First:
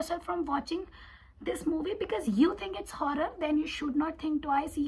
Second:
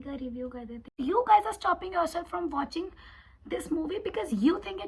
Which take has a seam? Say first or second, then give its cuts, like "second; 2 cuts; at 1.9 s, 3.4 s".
second; 1 cut; at 0.9 s